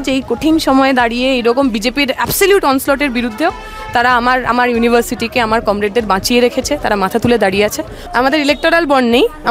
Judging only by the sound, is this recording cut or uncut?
cut